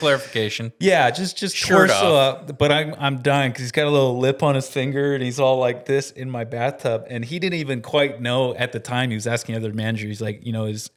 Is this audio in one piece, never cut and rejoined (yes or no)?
yes